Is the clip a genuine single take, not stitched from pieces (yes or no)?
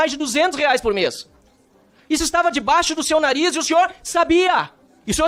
yes